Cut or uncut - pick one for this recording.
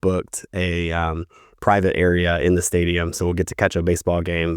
uncut